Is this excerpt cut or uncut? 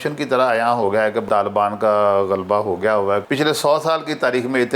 cut